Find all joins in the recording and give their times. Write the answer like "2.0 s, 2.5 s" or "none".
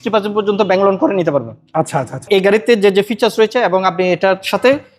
2.3 s